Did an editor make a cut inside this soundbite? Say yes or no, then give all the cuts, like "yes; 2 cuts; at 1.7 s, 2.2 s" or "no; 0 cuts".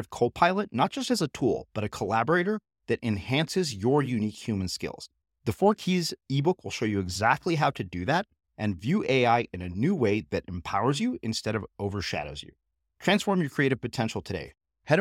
no; 0 cuts